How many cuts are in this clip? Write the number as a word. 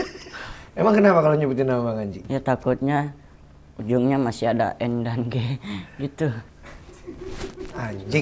two